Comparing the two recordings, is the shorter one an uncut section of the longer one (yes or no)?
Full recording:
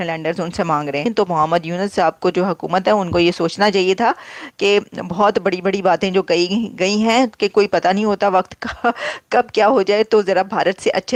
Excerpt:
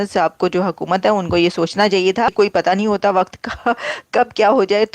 no